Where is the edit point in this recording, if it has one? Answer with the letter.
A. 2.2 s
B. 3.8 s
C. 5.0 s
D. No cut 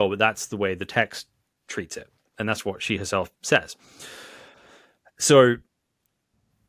D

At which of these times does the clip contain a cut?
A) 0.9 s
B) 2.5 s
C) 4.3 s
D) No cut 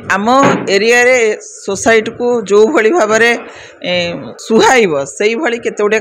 C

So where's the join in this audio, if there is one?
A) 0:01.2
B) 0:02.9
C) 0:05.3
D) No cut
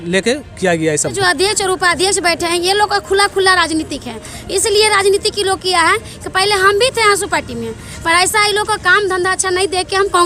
A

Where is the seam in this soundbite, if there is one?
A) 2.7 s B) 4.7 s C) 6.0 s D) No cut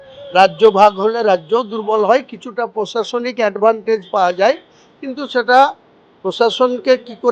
D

